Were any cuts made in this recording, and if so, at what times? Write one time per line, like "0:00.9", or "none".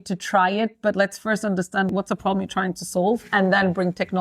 0:01.9